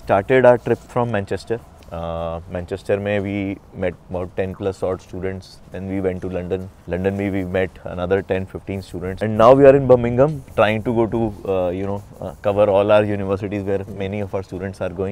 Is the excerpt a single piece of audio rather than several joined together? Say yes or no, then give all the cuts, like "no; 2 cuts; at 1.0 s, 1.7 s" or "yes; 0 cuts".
yes; 0 cuts